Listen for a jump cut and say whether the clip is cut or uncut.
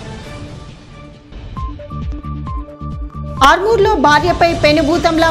uncut